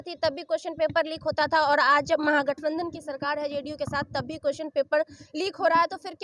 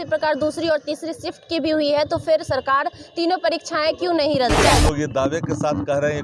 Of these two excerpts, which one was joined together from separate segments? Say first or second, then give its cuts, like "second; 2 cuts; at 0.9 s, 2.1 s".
second; 1 cut; at 4.6 s